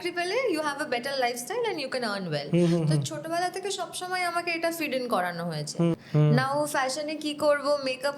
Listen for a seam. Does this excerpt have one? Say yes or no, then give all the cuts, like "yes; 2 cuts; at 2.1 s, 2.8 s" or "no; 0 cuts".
yes; 1 cut; at 6.0 s